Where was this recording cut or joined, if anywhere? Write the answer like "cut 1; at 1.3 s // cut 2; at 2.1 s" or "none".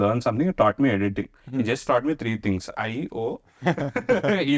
none